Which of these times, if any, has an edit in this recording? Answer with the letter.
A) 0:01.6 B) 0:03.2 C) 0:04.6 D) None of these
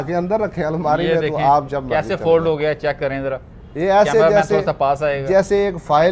D